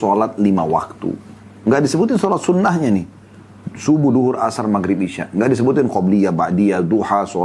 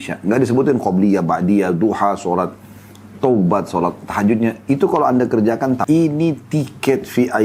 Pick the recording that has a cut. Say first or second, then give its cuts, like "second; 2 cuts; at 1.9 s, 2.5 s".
second; 1 cut; at 5.8 s